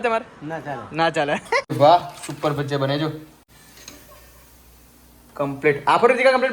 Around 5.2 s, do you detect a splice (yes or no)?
no